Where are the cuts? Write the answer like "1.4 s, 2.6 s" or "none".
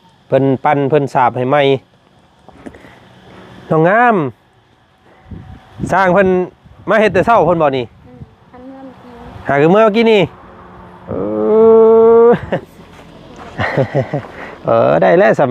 12.5 s

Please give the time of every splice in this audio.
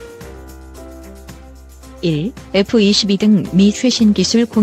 2.0 s

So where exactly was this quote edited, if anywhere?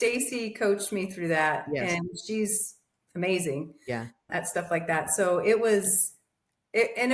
none

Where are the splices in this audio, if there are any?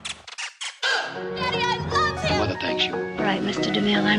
1.1 s

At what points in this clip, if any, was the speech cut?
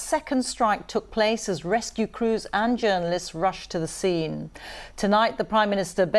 1.2 s, 3.2 s

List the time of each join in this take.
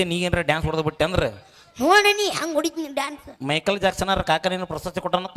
none

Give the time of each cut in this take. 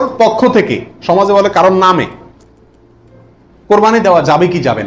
none

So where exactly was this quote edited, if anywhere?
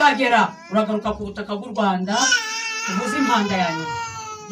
none

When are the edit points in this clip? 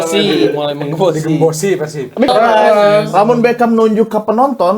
2.3 s

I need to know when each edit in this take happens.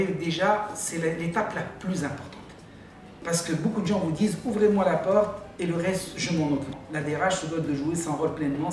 6.8 s

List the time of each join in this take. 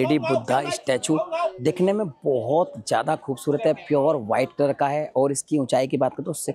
none

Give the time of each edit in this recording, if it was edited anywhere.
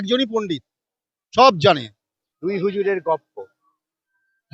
2.7 s

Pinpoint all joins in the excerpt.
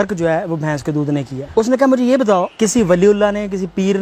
1.4 s, 2.5 s

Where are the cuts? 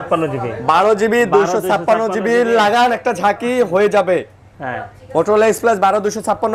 none

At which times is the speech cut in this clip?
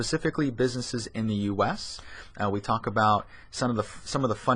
none

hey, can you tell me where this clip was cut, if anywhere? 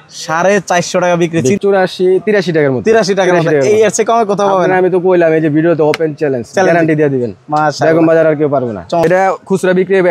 1.6 s, 9.0 s

